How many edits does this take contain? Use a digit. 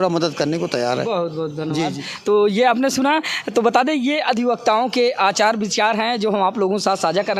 0